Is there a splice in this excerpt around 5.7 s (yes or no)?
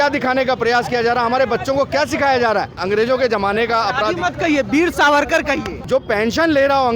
yes